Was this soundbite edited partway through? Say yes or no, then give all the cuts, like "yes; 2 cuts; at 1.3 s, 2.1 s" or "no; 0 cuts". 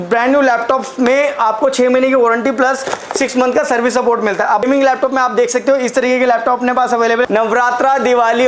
yes; 2 cuts; at 4.6 s, 7.3 s